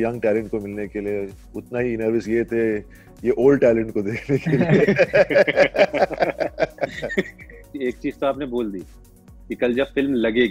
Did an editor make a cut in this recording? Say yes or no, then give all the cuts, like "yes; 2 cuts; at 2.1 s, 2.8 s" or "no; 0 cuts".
yes; 1 cut; at 7.7 s